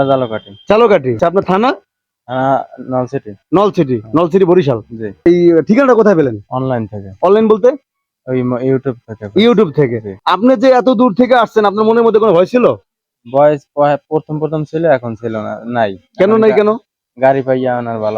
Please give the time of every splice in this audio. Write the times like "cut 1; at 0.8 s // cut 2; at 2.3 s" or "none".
cut 1; at 1.2 s // cut 2; at 5.2 s // cut 3; at 10.1 s

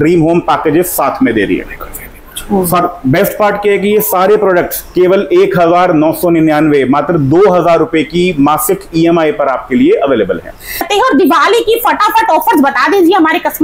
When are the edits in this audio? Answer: cut 1; at 10.9 s

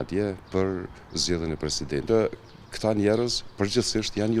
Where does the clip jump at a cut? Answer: cut 1; at 2.0 s

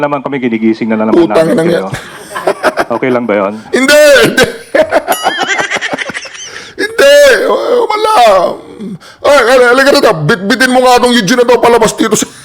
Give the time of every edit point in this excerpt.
cut 1; at 1.1 s

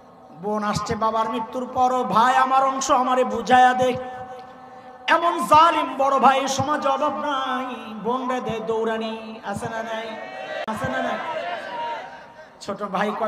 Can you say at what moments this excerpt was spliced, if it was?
cut 1; at 10.6 s

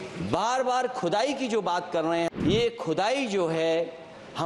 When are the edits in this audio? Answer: cut 1; at 2.3 s

